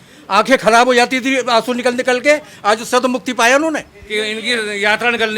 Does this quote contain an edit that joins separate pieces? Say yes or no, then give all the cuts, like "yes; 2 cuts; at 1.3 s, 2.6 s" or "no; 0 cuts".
yes; 1 cut; at 4.0 s